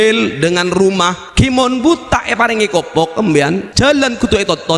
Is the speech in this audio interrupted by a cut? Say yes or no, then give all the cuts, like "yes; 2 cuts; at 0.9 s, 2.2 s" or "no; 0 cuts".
yes; 2 cuts; at 1.2 s, 3.7 s